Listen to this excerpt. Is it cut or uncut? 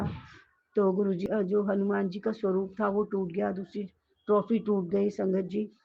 cut